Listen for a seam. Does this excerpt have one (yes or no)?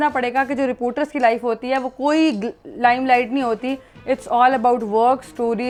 no